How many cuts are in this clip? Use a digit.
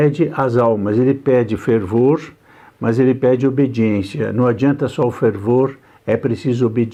0